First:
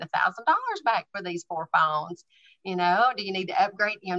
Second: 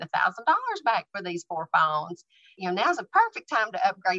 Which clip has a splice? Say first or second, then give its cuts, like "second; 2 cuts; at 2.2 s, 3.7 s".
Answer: second; 1 cut; at 2.5 s